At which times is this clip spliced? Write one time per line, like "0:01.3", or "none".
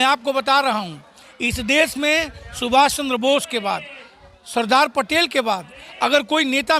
none